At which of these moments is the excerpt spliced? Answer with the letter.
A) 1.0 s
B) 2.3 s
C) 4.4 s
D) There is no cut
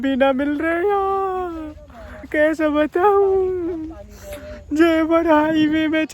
B